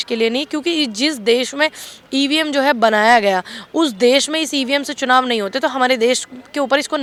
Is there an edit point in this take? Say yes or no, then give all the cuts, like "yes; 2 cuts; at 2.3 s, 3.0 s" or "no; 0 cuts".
no; 0 cuts